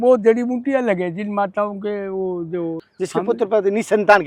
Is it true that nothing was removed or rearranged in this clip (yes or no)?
yes